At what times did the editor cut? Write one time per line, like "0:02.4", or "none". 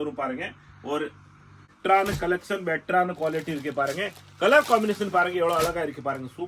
0:01.7

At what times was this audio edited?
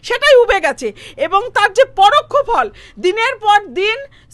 none

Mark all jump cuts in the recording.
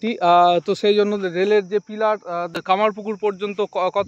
0:02.8

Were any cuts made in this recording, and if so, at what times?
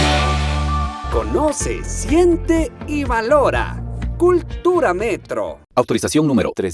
0:01.0

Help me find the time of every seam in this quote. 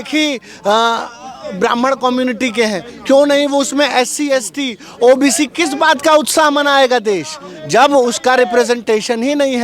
none

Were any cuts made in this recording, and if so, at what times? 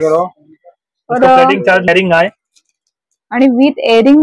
0:01.9

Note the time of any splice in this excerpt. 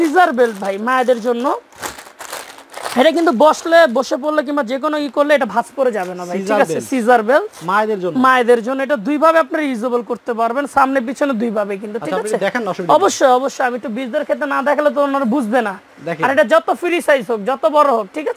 none

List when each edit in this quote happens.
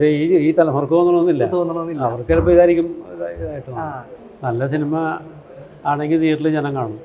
0:04.1

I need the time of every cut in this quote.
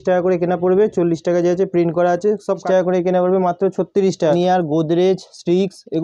0:02.6
0:04.3

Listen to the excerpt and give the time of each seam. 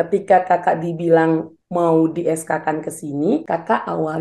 0:01.6
0:03.4

